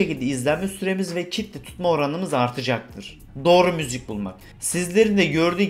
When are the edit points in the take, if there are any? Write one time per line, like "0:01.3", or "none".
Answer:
0:04.7